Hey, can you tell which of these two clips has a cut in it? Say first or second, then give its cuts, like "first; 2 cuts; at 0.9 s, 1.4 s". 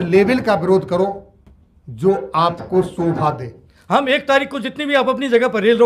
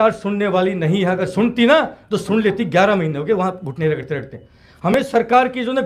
first; 1 cut; at 3.7 s